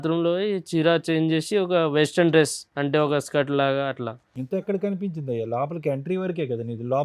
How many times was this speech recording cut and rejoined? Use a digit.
0